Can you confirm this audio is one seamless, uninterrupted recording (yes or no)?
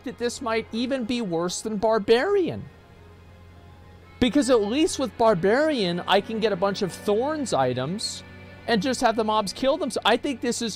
yes